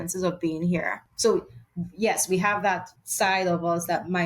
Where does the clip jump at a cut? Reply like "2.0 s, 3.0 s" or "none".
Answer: 1.0 s, 3.0 s